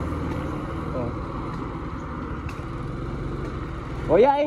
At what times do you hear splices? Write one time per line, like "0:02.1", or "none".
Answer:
none